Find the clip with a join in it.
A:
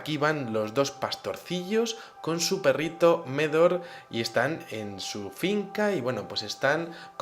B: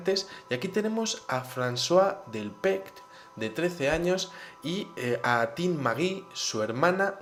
A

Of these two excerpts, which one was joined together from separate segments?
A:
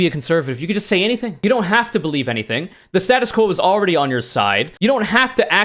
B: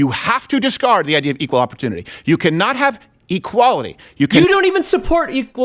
A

